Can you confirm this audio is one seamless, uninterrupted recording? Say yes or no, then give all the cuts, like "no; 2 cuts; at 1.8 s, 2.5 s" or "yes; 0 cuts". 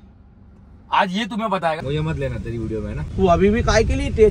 no; 2 cuts; at 1.8 s, 3.1 s